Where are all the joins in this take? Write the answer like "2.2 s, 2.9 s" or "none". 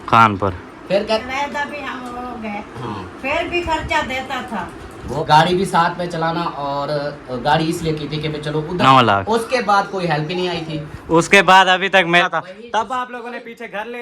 1.2 s, 5.2 s, 8.8 s, 12.2 s